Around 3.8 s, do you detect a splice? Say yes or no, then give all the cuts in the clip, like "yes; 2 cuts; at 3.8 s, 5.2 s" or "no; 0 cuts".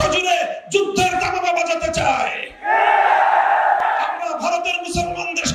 yes; 1 cut; at 3.8 s